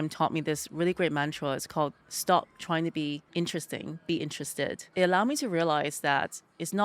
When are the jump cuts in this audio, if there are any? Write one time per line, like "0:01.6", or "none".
0:02.1
0:03.2
0:04.8

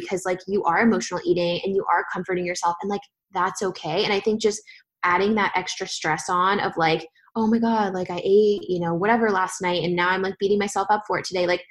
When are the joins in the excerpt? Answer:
none

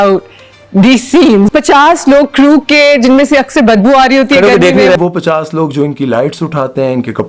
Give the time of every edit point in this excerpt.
0:01.5
0:05.0

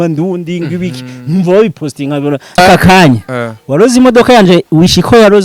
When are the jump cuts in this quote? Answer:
0:02.6

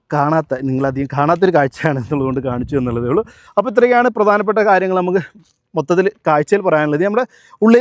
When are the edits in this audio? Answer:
none

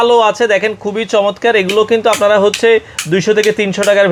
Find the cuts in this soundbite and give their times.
none

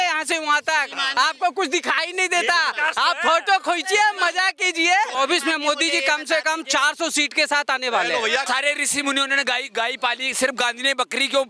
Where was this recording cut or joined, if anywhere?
0:05.1
0:08.5

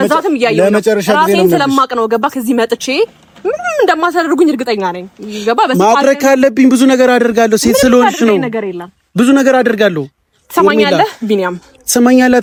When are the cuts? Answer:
none

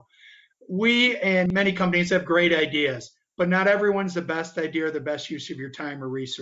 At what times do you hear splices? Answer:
0:01.5

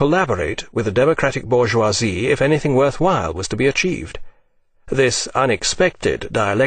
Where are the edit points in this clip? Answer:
none

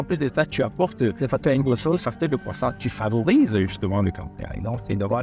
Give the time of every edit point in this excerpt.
none

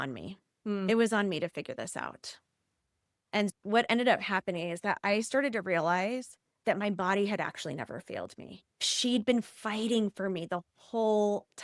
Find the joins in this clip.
none

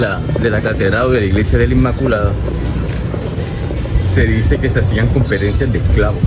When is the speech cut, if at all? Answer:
none

